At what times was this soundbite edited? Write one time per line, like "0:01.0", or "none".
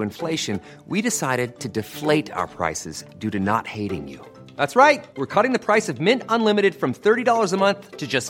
none